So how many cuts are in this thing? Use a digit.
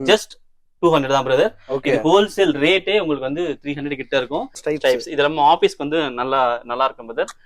1